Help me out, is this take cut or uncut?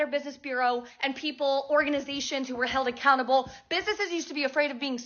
uncut